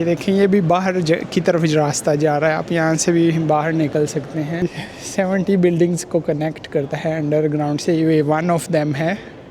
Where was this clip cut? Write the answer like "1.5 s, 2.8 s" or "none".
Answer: 4.6 s